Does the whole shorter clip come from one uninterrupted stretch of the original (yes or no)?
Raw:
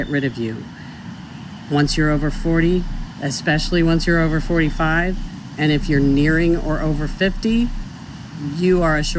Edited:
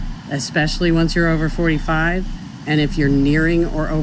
yes